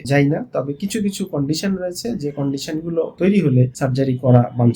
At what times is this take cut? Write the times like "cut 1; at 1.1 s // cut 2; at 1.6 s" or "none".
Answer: cut 1; at 3.1 s // cut 2; at 3.7 s